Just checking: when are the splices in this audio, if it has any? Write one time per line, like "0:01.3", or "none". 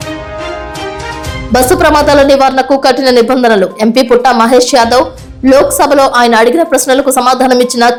none